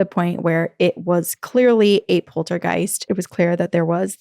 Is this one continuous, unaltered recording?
no; 1 cut; at 3.1 s

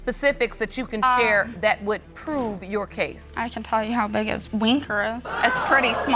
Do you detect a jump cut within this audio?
no; 0 cuts

